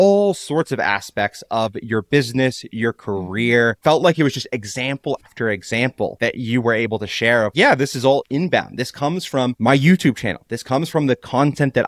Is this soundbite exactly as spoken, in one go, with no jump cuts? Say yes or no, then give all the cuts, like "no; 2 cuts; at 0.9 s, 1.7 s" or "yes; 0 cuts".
no; 1 cut; at 6.1 s